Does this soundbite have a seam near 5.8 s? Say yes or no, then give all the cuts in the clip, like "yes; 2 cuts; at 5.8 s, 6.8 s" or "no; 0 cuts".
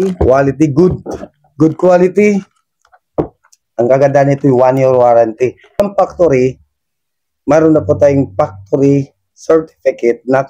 yes; 1 cut; at 5.8 s